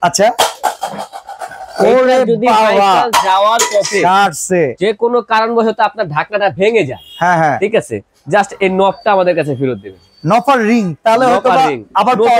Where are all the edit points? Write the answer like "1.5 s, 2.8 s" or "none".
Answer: none